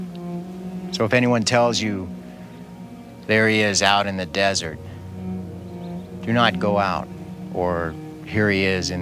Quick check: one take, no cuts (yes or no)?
no